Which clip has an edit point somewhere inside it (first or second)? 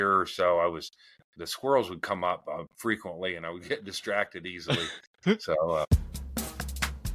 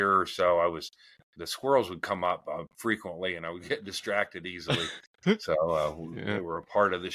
first